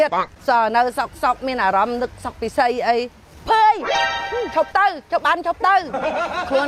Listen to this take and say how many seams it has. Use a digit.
0